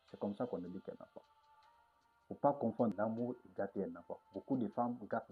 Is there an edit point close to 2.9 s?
yes; 1 cut; at 2.9 s

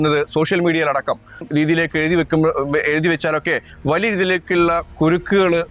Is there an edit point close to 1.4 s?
yes; 1 cut; at 1.4 s

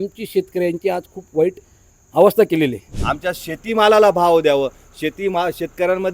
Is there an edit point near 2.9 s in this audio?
yes; 1 cut; at 2.9 s

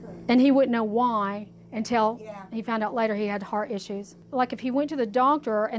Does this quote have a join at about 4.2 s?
yes; 1 cut; at 4.2 s

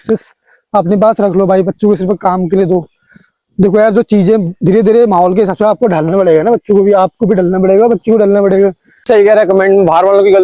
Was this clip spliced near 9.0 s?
yes; 1 cut; at 9.0 s

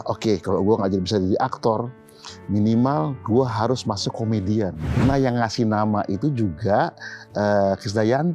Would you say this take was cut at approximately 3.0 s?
no; 1 cut; at 4.9 s

